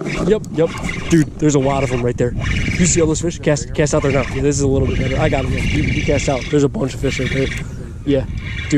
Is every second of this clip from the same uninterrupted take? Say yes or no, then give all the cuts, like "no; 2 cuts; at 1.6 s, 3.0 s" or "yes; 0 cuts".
yes; 0 cuts